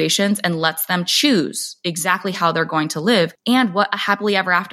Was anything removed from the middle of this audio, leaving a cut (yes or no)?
yes